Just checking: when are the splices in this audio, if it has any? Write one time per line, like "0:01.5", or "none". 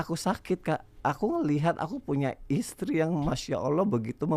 0:00.9